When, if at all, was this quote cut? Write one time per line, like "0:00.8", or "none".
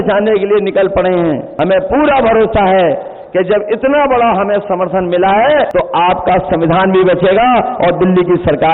0:01.5
0:05.7